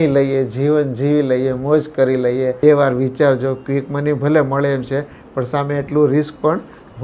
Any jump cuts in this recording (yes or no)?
yes